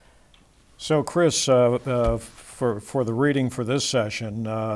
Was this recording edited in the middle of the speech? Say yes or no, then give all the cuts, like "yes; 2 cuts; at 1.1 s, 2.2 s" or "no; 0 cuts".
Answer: no; 0 cuts